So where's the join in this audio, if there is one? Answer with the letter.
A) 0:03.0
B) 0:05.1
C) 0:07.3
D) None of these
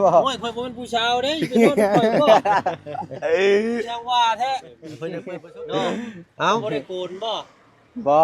B